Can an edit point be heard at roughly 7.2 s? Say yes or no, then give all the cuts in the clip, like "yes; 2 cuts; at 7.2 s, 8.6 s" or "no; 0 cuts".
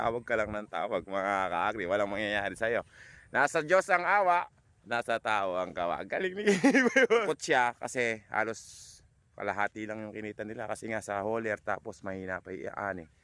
yes; 1 cut; at 7.2 s